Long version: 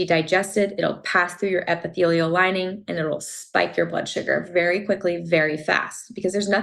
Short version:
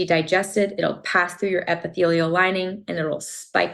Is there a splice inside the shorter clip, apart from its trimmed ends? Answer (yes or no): no